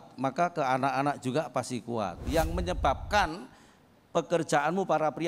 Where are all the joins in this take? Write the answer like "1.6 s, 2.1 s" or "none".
2.2 s